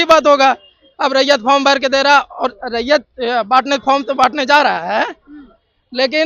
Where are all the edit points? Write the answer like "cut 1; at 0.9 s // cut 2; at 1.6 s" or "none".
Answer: none

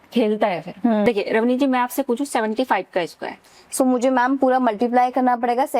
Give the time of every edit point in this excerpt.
cut 1; at 1.0 s

